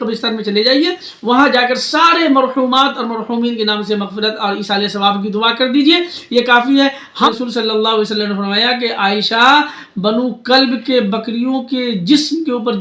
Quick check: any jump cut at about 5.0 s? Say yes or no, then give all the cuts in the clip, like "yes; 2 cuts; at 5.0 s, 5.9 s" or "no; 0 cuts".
no; 1 cut; at 7.3 s